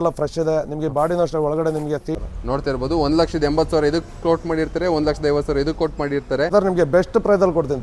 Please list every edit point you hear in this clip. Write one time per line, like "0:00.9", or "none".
0:02.0
0:06.5